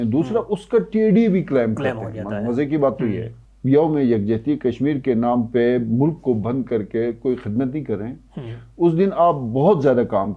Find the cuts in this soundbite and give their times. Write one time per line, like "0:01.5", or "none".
0:03.4